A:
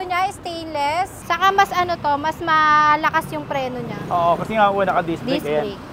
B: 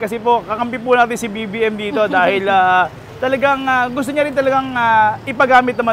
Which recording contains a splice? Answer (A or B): A